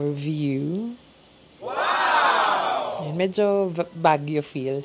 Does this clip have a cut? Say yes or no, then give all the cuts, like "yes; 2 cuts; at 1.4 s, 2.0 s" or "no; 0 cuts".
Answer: yes; 2 cuts; at 1.6 s, 3.0 s